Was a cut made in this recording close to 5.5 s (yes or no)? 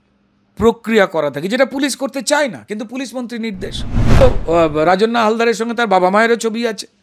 no